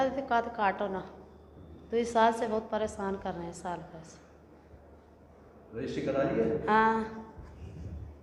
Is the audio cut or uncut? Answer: uncut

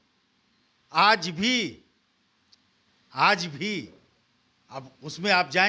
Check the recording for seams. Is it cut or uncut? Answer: uncut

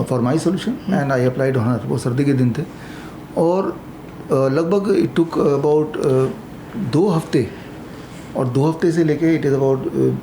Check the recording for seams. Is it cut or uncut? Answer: uncut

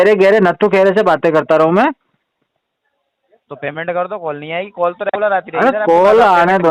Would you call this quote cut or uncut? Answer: uncut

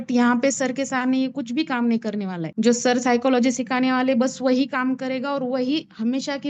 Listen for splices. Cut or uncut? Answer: uncut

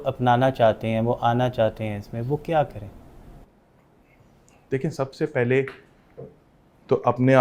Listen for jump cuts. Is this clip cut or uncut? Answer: uncut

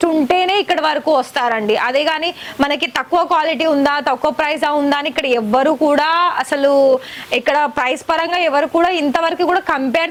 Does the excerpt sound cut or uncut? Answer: uncut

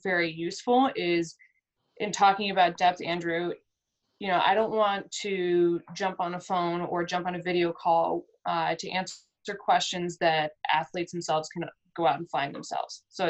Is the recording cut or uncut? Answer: uncut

